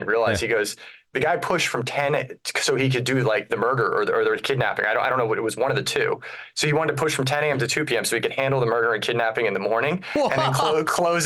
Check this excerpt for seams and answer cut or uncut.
uncut